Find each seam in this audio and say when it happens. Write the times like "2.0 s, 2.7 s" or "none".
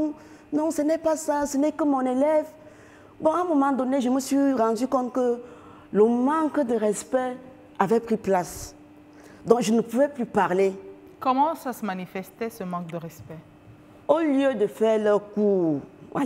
11.1 s

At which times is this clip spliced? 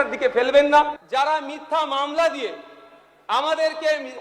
1.0 s

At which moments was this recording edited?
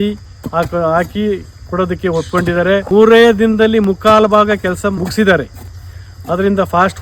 2.9 s, 5.0 s

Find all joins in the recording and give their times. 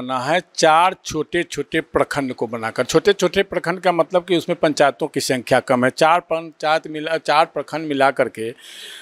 none

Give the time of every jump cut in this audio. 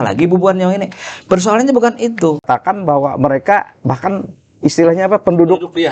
2.4 s

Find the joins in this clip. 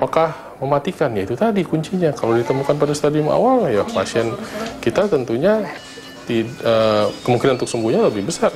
none

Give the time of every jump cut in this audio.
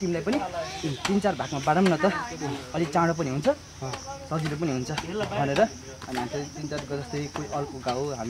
none

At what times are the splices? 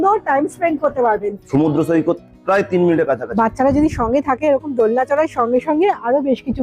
1.4 s, 3.3 s

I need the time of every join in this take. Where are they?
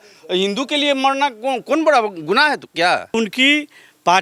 3.2 s

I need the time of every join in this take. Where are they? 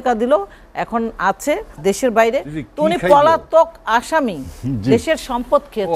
1.8 s

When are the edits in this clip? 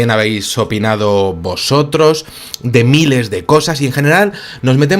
1.8 s

